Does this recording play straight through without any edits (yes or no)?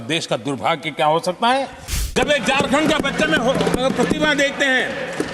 no